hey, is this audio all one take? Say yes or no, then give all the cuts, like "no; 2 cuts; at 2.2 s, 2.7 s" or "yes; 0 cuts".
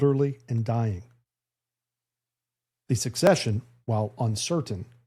yes; 0 cuts